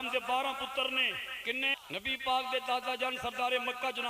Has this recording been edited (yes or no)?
yes